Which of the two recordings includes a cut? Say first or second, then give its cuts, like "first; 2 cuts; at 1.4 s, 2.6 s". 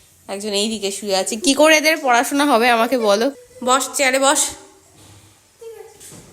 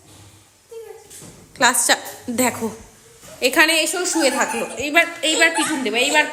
first; 1 cut; at 3.5 s